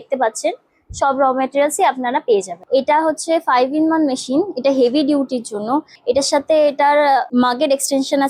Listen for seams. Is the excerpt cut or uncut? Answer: cut